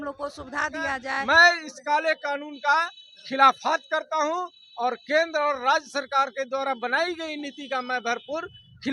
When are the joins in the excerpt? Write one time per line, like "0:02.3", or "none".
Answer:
0:01.1